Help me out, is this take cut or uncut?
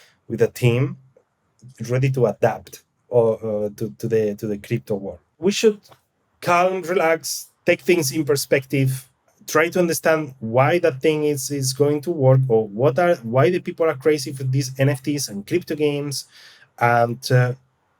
cut